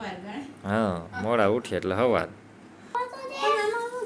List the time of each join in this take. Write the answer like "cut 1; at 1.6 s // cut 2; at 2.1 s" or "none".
cut 1; at 2.9 s